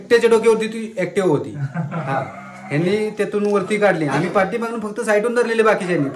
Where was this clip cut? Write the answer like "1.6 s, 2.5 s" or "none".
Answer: none